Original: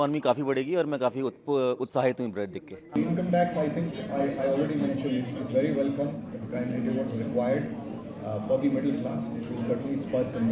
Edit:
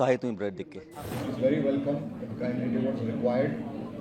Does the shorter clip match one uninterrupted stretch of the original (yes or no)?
no